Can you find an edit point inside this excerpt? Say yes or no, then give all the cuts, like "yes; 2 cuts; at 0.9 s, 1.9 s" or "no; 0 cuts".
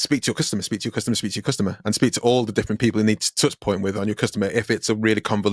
no; 0 cuts